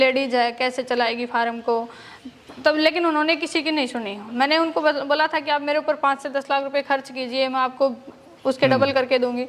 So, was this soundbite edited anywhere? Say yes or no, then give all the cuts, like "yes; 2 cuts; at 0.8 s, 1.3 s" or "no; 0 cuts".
no; 0 cuts